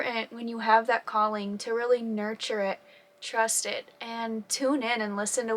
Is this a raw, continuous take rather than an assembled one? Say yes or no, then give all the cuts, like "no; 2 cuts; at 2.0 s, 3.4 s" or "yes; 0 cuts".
yes; 0 cuts